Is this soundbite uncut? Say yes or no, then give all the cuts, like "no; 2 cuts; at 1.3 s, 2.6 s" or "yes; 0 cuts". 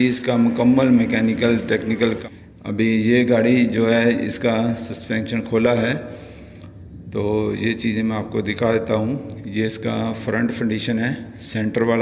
no; 1 cut; at 2.2 s